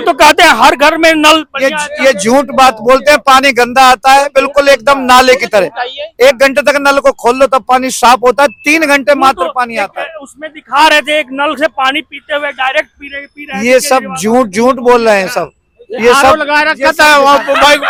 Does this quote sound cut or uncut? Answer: uncut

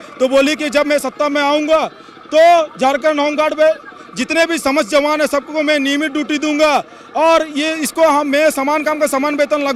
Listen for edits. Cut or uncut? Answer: uncut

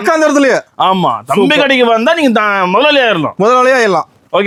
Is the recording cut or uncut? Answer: uncut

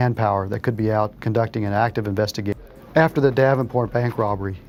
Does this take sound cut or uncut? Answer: uncut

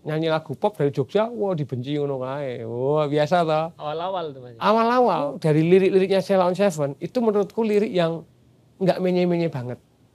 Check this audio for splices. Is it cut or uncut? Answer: cut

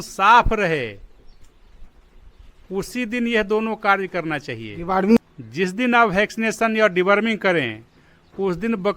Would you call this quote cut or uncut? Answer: cut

